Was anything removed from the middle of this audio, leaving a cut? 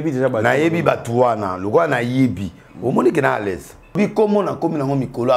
yes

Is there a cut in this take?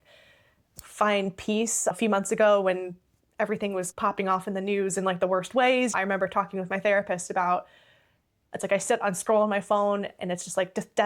yes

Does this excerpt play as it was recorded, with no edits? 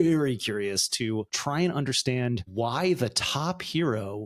yes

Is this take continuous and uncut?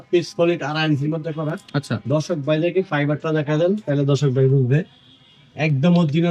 yes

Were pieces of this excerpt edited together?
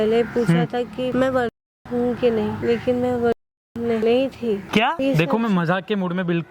yes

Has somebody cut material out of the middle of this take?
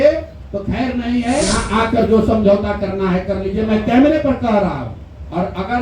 yes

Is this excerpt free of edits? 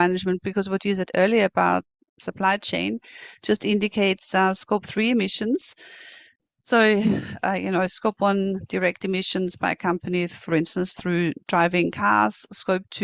yes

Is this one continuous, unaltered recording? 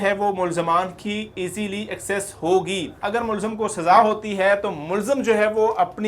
no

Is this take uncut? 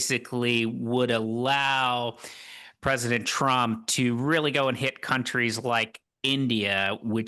yes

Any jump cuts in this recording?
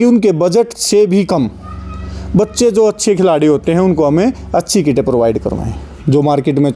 no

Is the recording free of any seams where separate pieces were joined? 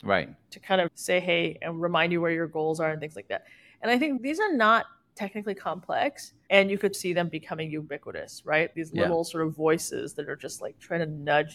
no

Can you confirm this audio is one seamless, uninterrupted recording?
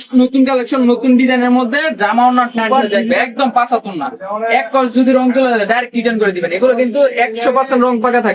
no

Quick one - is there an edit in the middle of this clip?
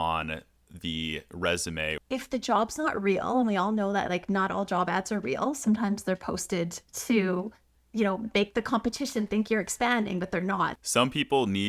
yes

